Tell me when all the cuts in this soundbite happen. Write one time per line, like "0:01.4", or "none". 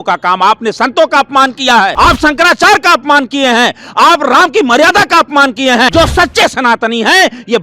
0:01.9
0:05.9